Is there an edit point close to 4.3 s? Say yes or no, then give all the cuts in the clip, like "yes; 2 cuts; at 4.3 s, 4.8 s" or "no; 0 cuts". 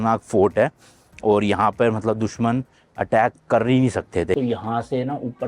yes; 1 cut; at 4.3 s